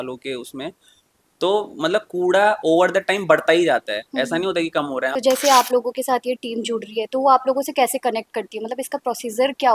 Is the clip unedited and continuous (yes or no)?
no